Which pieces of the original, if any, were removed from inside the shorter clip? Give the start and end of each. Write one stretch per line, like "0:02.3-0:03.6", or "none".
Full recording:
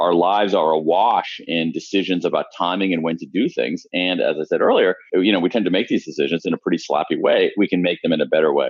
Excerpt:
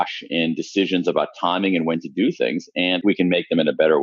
0:04.2-0:07.5